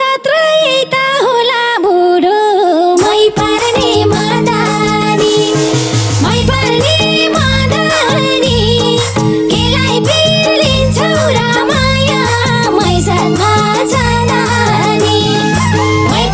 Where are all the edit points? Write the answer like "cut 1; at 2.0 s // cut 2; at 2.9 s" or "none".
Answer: none

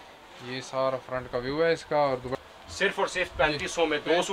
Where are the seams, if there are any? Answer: cut 1; at 2.3 s

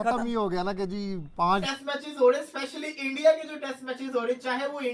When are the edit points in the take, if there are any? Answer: cut 1; at 1.6 s

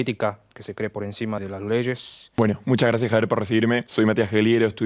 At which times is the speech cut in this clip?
cut 1; at 1.4 s // cut 2; at 2.2 s // cut 3; at 3.9 s

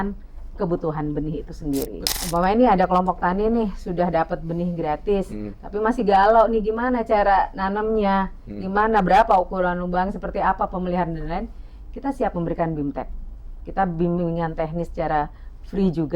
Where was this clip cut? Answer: cut 1; at 2.1 s

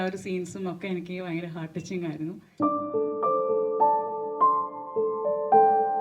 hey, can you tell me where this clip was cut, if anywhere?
cut 1; at 2.4 s

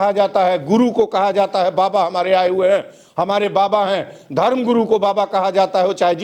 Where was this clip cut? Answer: none

